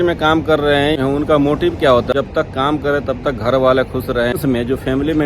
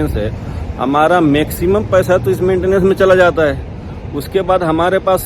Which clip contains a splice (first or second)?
first